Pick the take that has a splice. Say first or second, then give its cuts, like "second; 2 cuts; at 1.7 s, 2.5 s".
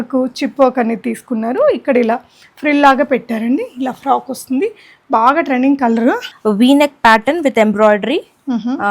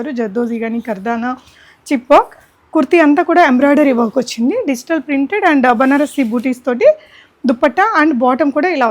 first; 1 cut; at 6.3 s